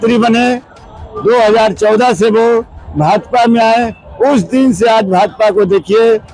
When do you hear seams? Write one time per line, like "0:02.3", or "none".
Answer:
none